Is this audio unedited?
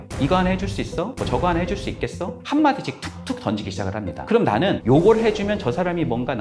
no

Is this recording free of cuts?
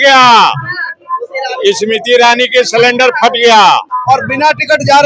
no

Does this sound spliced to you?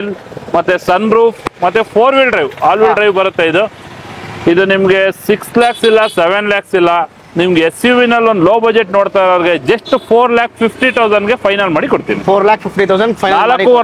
no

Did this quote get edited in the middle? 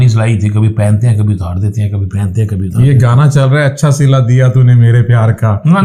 no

